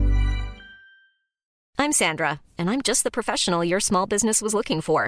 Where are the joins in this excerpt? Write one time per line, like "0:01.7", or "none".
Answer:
0:01.5